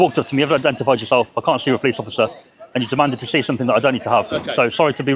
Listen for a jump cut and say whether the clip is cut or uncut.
uncut